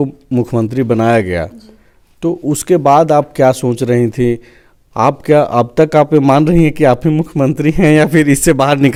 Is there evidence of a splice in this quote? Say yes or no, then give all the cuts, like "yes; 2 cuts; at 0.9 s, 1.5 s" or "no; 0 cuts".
no; 0 cuts